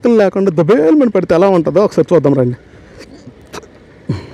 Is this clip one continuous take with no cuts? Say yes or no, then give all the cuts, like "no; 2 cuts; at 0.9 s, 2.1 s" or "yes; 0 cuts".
yes; 0 cuts